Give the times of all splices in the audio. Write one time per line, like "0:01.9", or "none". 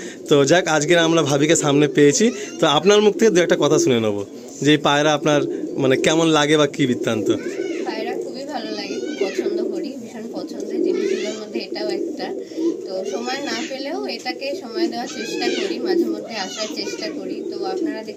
none